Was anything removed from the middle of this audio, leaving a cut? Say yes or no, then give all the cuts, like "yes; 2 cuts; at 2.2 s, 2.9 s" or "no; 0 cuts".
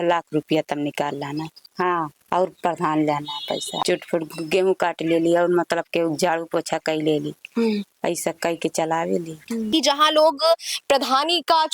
yes; 3 cuts; at 1.7 s, 3.7 s, 9.7 s